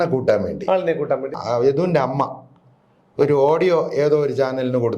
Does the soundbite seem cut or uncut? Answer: cut